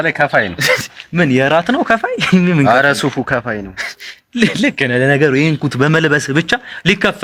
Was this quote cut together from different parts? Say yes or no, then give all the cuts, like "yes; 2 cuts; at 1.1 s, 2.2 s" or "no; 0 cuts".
no; 0 cuts